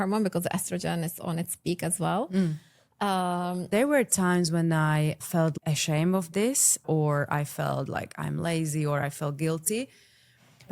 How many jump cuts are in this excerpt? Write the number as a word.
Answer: one